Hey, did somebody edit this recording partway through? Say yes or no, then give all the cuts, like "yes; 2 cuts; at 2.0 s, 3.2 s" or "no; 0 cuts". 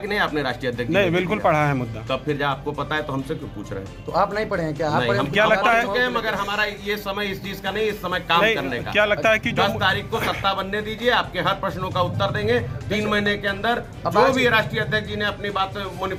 no; 0 cuts